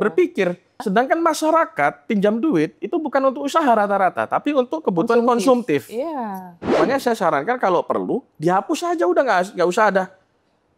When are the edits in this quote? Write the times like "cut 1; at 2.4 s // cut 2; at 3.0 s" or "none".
cut 1; at 0.8 s // cut 2; at 6.6 s